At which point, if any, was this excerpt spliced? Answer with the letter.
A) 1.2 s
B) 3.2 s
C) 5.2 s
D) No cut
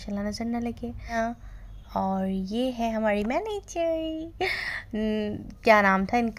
A